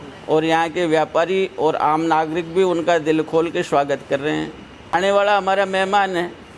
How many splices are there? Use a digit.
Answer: 1